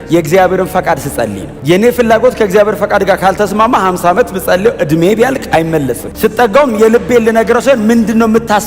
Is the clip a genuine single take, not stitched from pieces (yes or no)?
no